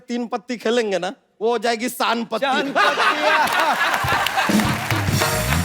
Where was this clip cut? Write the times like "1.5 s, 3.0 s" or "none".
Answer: 1.2 s